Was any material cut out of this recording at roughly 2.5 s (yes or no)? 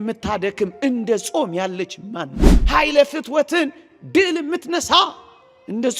yes